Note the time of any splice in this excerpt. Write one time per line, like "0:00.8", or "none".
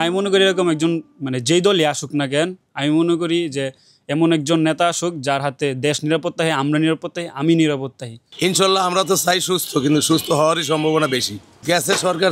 none